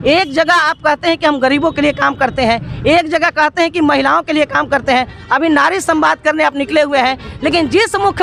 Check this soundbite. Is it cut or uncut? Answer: uncut